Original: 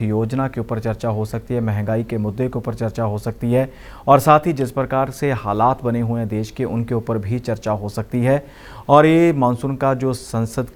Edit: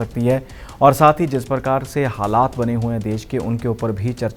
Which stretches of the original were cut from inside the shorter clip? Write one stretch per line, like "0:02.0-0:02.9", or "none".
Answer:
none